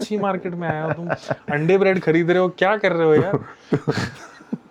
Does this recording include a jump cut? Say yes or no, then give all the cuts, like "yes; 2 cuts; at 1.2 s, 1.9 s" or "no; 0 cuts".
no; 0 cuts